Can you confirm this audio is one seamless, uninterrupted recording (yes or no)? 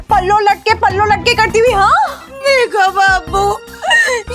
no